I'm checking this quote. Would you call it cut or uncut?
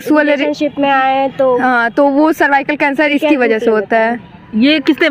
uncut